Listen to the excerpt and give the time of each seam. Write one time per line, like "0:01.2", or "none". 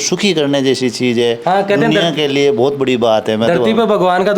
none